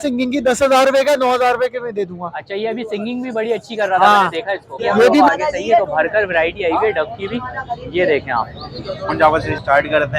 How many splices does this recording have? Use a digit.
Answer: 2